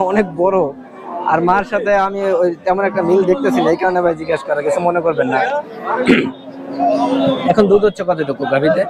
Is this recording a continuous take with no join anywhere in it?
yes; 0 cuts

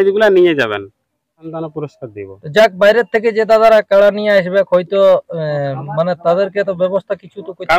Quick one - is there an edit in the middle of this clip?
yes; 1 cut; at 1.5 s

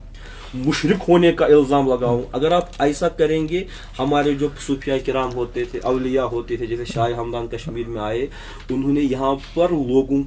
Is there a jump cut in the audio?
no; 0 cuts

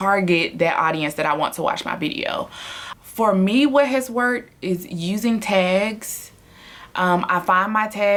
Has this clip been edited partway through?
no; 0 cuts

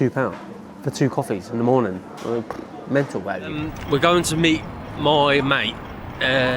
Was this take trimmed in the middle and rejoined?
no; 0 cuts

